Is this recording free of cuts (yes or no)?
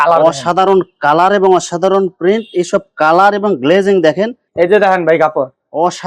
no